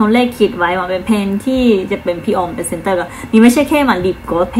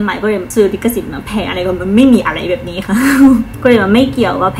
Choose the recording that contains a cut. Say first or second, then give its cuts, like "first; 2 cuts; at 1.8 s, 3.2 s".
second; 1 cut; at 3.5 s